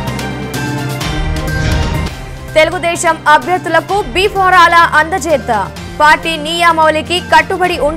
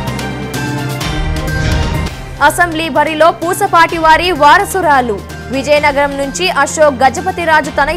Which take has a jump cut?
second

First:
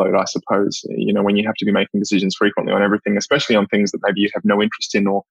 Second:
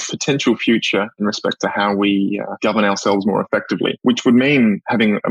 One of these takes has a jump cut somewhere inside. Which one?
second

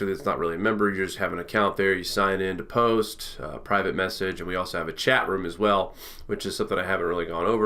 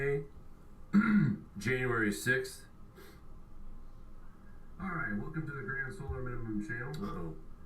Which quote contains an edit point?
second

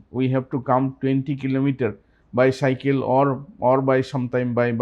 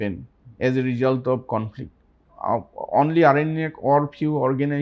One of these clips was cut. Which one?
second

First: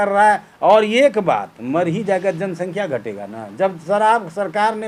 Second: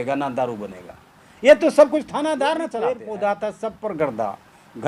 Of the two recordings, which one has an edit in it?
second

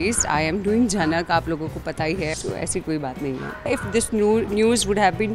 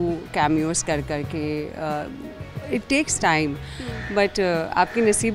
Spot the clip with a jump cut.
first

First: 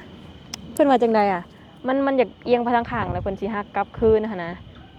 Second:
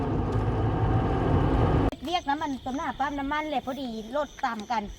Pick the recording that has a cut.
second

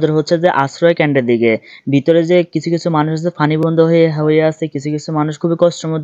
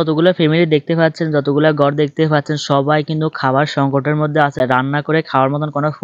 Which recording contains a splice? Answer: second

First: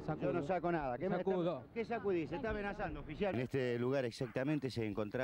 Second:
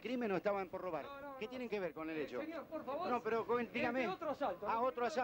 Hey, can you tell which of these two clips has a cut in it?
first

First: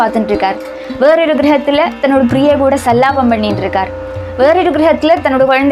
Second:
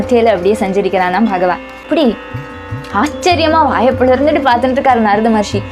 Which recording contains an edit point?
second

